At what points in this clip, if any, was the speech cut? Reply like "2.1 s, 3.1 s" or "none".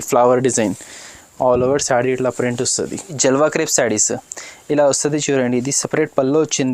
3.2 s